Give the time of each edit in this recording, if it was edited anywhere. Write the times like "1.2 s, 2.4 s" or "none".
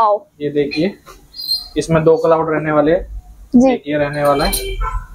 none